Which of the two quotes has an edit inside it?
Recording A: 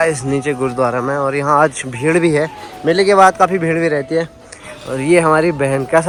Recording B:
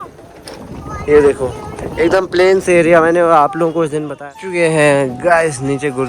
B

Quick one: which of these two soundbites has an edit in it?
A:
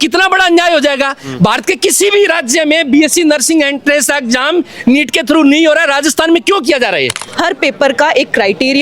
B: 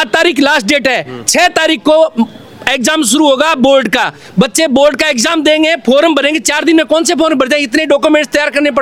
A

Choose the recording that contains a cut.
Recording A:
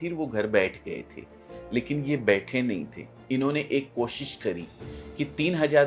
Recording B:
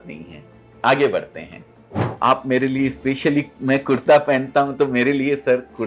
B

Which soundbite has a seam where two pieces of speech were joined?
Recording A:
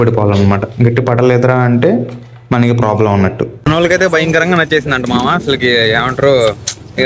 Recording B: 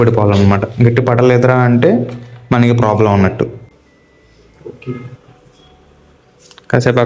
A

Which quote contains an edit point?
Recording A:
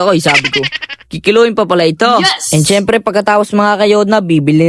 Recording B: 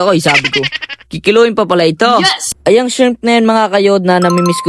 B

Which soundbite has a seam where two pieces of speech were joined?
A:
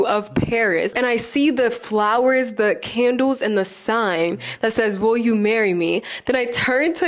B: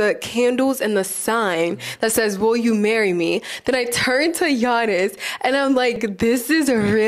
B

